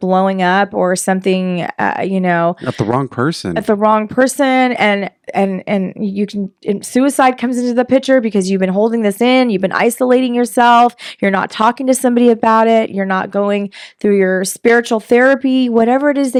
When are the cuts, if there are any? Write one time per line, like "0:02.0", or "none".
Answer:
none